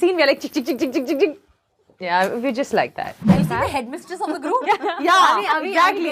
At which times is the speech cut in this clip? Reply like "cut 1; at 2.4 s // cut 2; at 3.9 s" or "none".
cut 1; at 3.2 s